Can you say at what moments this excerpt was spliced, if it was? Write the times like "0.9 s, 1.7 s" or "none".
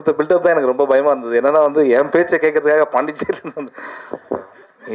none